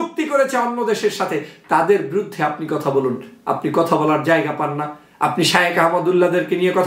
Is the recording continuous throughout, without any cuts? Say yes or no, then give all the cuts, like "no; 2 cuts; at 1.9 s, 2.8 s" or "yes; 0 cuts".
yes; 0 cuts